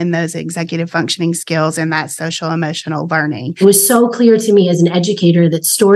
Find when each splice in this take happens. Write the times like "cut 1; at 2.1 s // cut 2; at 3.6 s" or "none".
cut 1; at 3.5 s